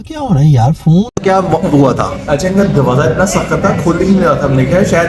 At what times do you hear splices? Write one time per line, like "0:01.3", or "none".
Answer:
0:01.2